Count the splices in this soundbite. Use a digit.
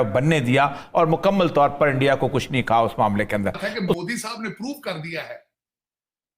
1